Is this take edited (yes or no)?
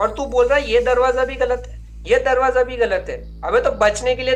no